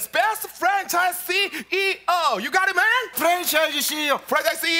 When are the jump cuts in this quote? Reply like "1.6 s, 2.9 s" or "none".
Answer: 3.1 s